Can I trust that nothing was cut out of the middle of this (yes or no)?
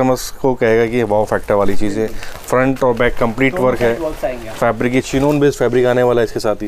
yes